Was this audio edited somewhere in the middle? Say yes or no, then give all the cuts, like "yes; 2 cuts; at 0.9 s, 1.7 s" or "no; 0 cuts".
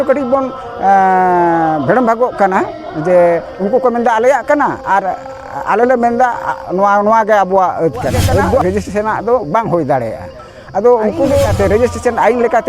yes; 2 cuts; at 8.6 s, 11.5 s